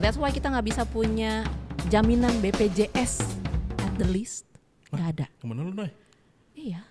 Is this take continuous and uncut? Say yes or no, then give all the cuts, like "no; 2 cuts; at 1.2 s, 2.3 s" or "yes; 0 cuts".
yes; 0 cuts